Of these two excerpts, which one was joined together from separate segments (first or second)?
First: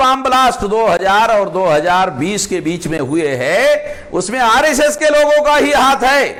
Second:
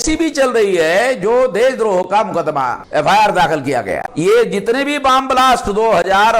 second